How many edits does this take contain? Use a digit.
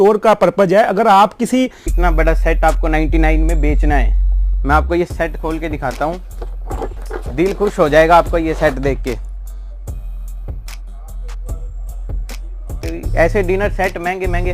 3